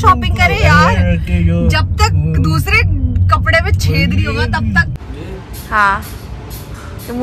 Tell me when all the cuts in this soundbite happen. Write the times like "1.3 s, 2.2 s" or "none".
5.0 s